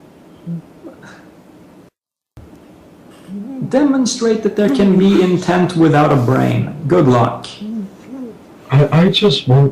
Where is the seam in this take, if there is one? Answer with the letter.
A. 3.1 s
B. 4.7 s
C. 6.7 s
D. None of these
C